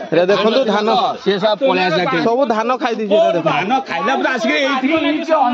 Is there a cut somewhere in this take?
no; 0 cuts

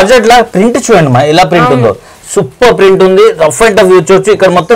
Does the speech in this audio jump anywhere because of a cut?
no; 0 cuts

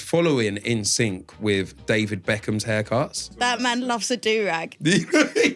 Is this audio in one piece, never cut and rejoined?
no; 1 cut; at 3.3 s

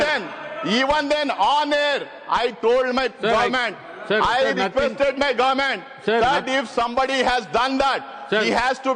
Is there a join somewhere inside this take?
no; 0 cuts

